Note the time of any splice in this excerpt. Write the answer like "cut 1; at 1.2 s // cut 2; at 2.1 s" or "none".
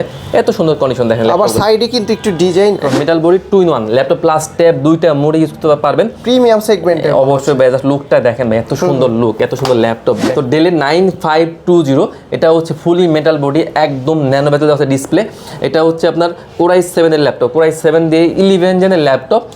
cut 1; at 3.0 s // cut 2; at 10.3 s